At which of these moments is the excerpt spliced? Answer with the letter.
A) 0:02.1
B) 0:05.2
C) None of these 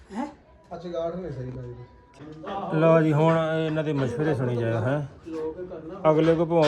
A